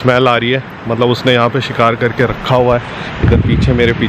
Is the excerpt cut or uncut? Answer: uncut